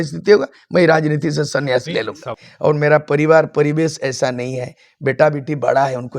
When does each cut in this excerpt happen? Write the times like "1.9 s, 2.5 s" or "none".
2.3 s